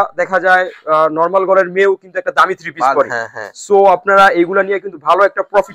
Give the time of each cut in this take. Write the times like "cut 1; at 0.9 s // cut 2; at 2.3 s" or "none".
none